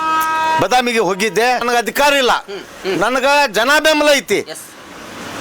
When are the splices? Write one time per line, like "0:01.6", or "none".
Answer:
0:01.6